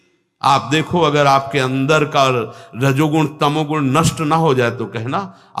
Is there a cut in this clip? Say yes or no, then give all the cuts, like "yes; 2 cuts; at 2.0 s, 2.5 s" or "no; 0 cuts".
no; 0 cuts